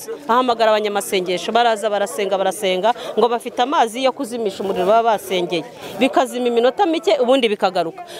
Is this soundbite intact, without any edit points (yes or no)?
yes